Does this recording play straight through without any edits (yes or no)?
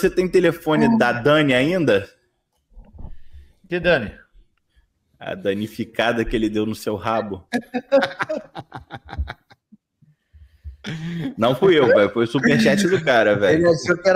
yes